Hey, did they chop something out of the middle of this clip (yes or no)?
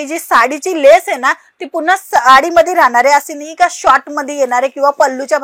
no